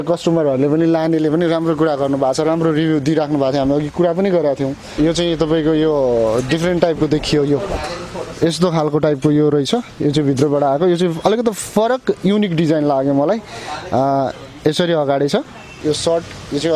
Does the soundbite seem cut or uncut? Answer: cut